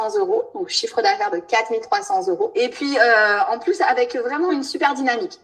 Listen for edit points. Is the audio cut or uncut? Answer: cut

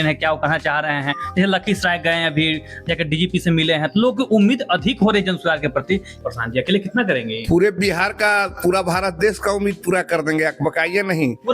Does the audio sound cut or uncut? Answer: cut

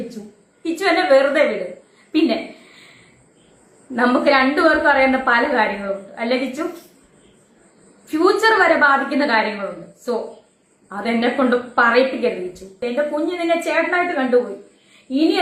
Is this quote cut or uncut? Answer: uncut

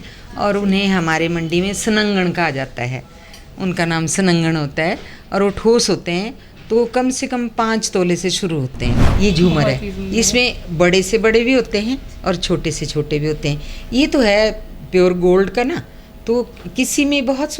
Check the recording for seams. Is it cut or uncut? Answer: cut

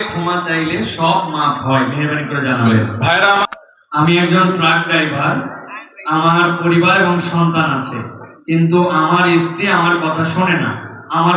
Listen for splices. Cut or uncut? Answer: cut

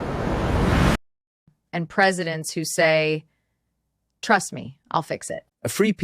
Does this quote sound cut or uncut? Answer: cut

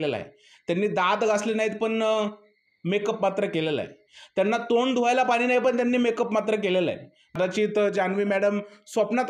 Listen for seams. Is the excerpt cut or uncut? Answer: cut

